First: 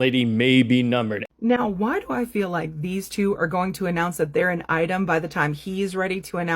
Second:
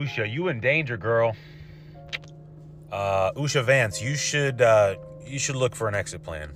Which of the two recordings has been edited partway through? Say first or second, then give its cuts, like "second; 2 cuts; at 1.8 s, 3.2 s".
first; 1 cut; at 1.2 s